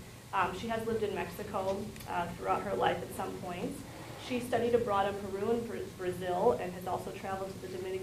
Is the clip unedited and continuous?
yes; 0 cuts

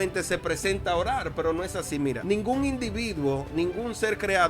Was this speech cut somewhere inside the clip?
yes; 1 cut; at 2.2 s

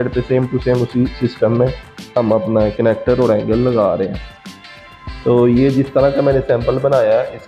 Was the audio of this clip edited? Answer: no; 0 cuts

